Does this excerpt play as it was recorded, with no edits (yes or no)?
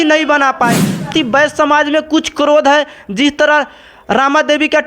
no